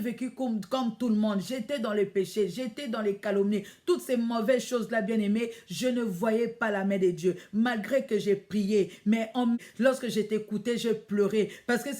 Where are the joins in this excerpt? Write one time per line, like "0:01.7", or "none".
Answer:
0:09.6